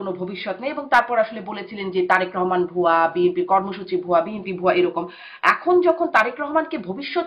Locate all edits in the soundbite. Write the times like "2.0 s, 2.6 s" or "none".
none